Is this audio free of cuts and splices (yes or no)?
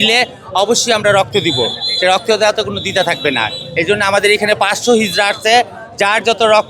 yes